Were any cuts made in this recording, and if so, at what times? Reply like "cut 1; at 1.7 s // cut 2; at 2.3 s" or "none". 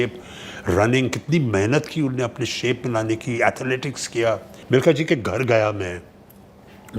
cut 1; at 4.5 s